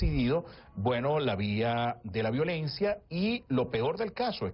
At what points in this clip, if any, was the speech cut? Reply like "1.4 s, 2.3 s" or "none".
2.0 s